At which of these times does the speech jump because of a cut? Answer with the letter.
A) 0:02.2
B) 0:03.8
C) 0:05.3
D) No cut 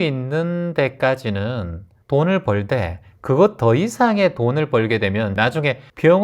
C